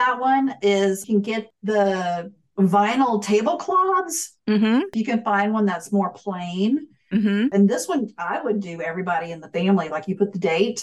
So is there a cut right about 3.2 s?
no; 2 cuts; at 4.9 s, 7.5 s

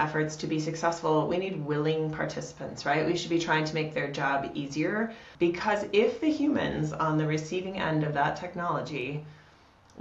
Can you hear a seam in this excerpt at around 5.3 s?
yes; 1 cut; at 5.3 s

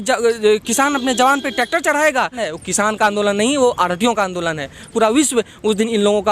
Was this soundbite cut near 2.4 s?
yes; 2 cuts; at 2.4 s, 4.8 s

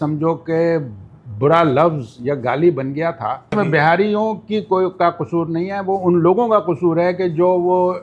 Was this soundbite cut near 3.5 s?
yes; 1 cut; at 3.5 s

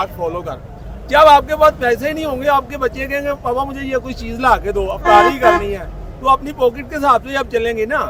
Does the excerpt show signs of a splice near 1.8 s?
no; 0 cuts

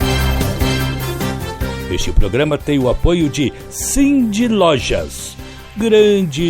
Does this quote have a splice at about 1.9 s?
yes; 2 cuts; at 0.9 s, 1.9 s

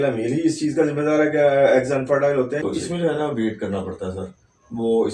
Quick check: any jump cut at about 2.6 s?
yes; 1 cut; at 2.6 s

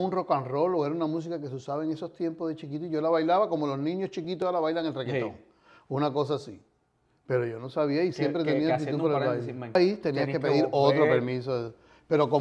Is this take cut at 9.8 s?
yes; 1 cut; at 9.8 s

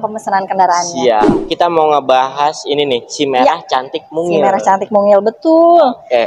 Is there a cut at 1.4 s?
yes; 1 cut; at 1.4 s

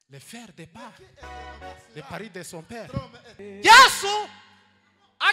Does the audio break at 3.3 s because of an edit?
yes; 1 cut; at 3.3 s

